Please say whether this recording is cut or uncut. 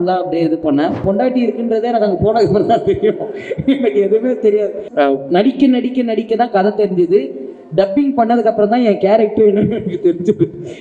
cut